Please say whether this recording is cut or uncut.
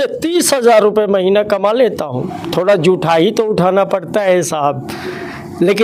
uncut